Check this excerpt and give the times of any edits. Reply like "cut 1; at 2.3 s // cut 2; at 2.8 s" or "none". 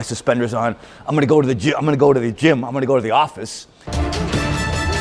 cut 1; at 3.9 s